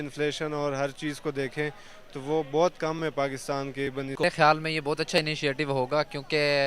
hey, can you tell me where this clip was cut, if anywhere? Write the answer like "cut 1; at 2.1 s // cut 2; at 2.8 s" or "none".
cut 1; at 4.2 s